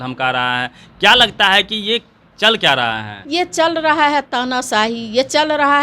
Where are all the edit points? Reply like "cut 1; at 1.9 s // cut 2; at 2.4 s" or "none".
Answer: cut 1; at 3.1 s